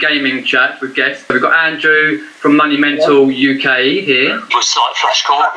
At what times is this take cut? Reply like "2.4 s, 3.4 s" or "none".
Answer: 1.3 s, 4.4 s